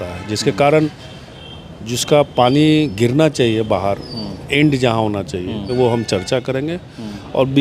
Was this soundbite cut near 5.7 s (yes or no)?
yes